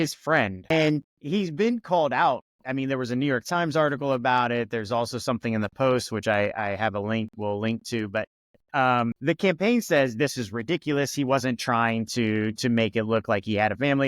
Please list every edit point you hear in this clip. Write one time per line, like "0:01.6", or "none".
0:01.1
0:09.2